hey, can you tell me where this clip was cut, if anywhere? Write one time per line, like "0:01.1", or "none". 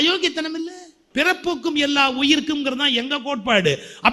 0:01.0